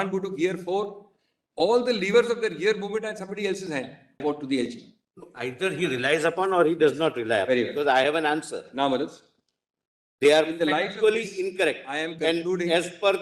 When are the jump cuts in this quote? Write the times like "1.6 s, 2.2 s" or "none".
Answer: 4.2 s